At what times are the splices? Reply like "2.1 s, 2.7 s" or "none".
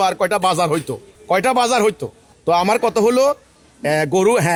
none